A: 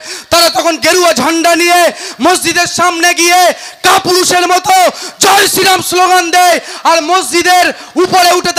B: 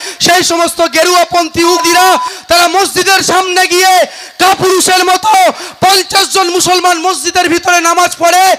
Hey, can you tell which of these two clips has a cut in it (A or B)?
B